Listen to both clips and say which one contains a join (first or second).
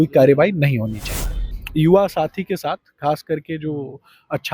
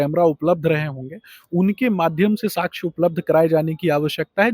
first